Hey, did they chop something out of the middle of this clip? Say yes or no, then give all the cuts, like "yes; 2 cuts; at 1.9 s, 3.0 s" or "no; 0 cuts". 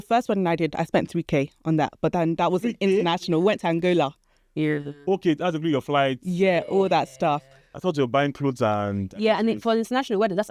no; 0 cuts